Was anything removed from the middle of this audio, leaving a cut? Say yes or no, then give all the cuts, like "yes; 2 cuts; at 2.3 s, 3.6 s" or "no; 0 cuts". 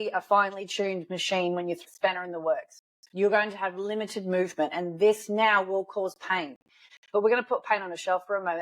yes; 3 cuts; at 1.8 s, 2.8 s, 6.8 s